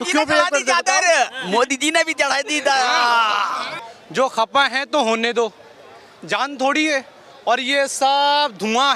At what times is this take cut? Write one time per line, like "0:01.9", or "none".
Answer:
0:03.7